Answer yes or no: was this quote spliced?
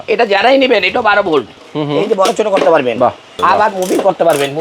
yes